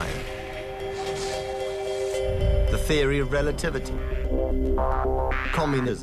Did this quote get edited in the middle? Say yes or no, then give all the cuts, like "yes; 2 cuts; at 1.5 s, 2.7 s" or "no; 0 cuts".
yes; 1 cut; at 4.1 s